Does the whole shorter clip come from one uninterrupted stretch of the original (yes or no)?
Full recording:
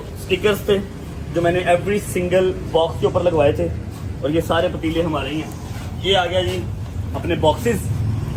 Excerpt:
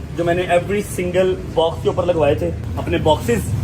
no